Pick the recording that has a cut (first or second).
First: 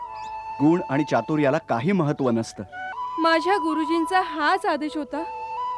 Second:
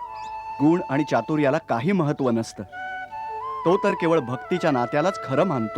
first